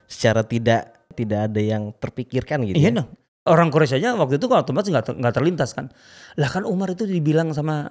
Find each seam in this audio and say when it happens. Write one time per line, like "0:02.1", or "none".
0:01.1
0:03.2